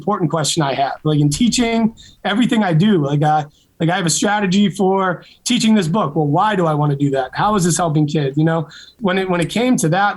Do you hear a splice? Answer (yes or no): yes